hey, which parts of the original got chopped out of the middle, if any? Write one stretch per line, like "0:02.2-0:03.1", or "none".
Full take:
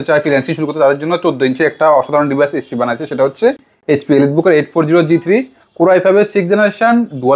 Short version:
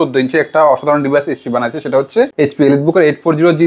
0:03.6-0:03.8